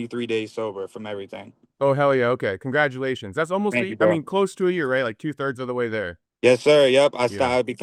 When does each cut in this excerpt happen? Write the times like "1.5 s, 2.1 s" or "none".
none